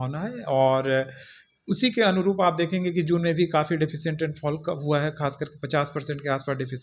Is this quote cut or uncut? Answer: uncut